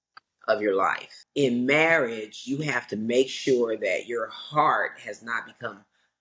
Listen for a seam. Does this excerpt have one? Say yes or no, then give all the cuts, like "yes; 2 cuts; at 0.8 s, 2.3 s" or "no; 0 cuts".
yes; 1 cut; at 1.2 s